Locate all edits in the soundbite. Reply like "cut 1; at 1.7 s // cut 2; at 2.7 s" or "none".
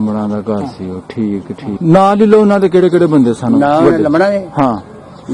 cut 1; at 1.7 s